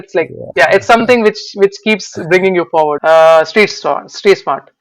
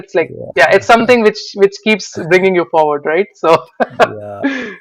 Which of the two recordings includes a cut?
first; 1 cut; at 3.0 s

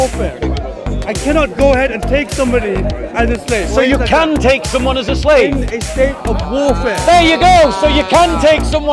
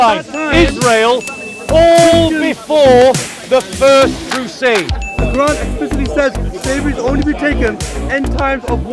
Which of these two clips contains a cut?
second; 2 cuts; at 3.3 s, 5.0 s

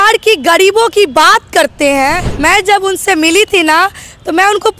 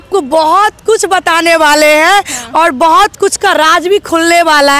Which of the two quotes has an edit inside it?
first; 1 cut; at 2.3 s

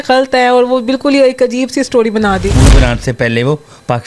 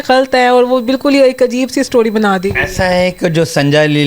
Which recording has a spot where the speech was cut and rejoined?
first; 1 cut; at 2.5 s

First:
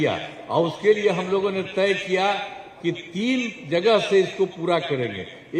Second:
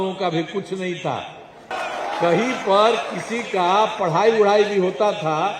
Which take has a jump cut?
second; 1 cut; at 1.8 s

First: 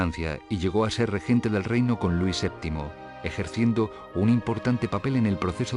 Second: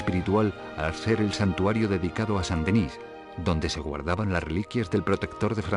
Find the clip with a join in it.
second; 1 cut; at 4.0 s

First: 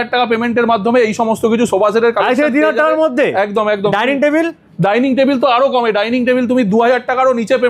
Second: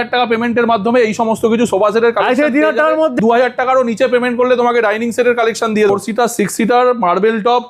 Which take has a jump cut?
second; 2 cuts; at 3.2 s, 5.9 s

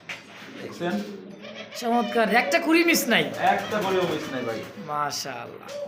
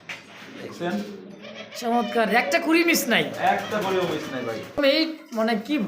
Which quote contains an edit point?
second; 1 cut; at 4.8 s

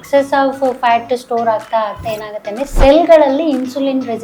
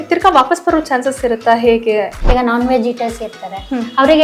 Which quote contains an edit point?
second; 1 cut; at 2.2 s

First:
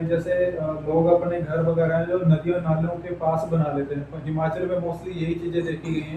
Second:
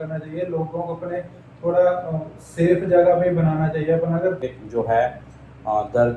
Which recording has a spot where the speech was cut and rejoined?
second; 1 cut; at 4.4 s

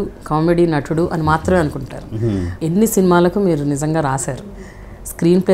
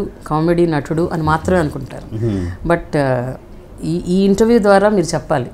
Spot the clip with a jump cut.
first; 1 cut; at 2.5 s

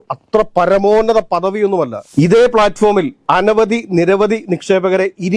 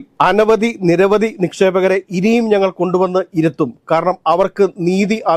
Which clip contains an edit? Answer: first; 1 cut; at 2.0 s

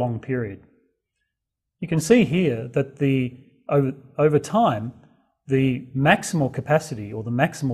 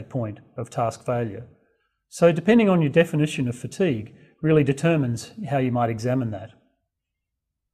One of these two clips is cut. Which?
first; 1 cut; at 4.9 s

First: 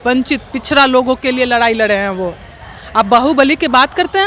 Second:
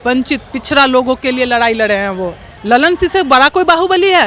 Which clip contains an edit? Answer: second; 1 cut; at 2.5 s

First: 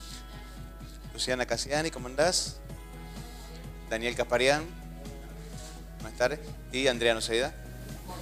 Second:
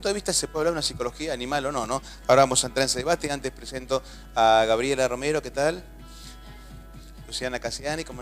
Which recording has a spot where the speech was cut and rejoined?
second; 1 cut; at 5.2 s

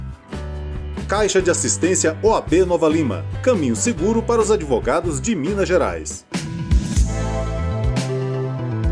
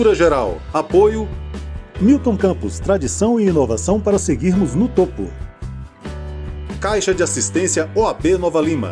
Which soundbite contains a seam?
first; 1 cut; at 6.2 s

